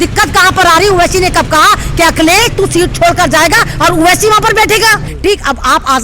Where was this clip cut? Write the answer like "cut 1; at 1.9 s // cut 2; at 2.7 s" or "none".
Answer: cut 1; at 5.1 s